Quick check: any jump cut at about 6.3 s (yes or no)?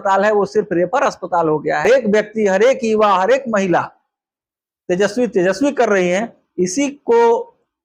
no